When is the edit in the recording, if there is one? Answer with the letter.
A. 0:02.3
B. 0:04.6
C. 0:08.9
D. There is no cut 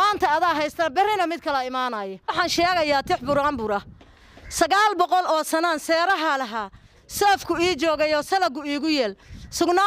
A